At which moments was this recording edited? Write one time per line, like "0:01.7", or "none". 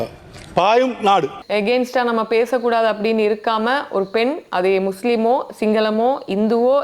0:01.4